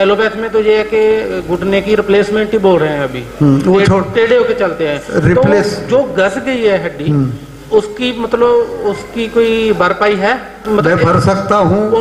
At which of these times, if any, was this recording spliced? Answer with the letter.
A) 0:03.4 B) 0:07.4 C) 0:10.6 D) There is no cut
C